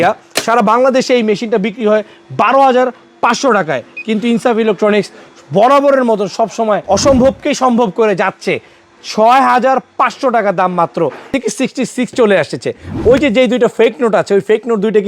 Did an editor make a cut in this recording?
yes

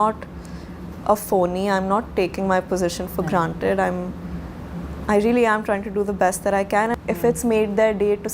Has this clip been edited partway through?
yes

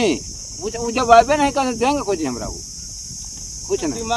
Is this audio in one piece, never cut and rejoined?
yes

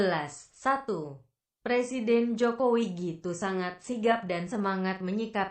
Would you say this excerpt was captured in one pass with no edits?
no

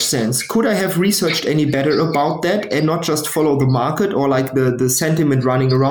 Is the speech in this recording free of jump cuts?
yes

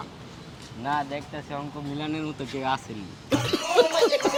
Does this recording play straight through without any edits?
yes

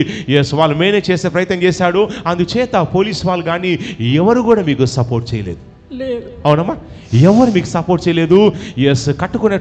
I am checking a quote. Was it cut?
no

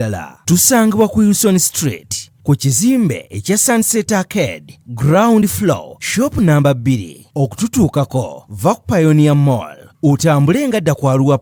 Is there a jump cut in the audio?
no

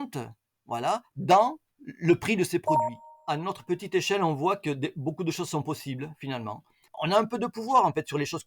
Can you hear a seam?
yes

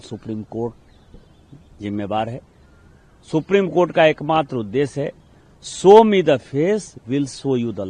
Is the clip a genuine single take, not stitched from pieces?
yes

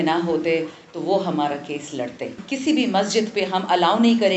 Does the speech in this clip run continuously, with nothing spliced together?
no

